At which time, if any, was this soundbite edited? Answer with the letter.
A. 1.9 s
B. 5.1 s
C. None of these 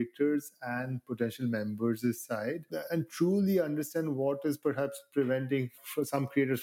C